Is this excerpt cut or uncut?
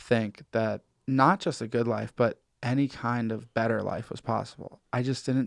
cut